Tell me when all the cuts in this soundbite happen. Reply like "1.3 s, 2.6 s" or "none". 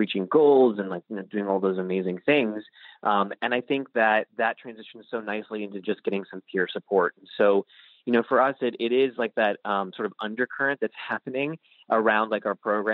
none